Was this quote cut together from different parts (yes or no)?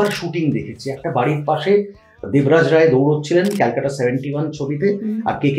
no